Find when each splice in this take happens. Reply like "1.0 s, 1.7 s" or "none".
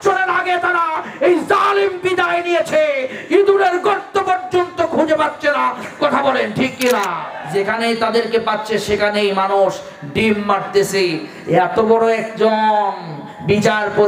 7.3 s